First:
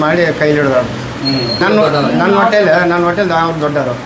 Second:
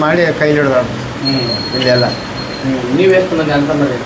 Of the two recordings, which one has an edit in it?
first; 1 cut; at 1.6 s

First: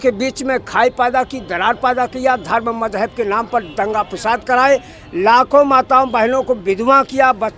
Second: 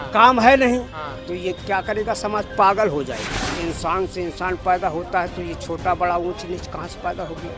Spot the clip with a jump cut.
second; 1 cut; at 3.5 s

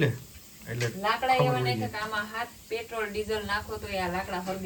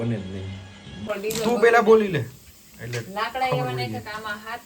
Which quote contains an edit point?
second; 1 cut; at 1.1 s

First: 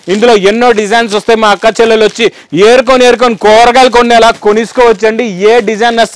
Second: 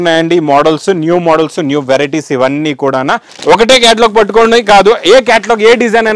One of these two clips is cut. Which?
second; 1 cut; at 3.3 s

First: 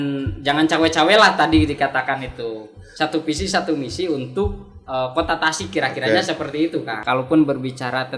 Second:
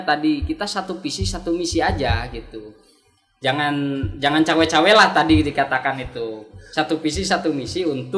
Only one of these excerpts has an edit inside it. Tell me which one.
first; 1 cut; at 7.0 s

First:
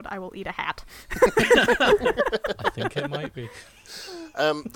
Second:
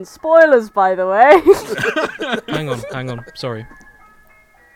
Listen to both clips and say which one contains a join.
second; 1 cut; at 1.6 s

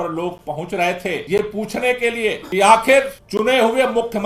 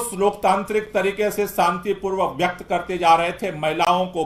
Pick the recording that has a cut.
first; 3 cuts; at 1.2 s, 2.4 s, 3.2 s

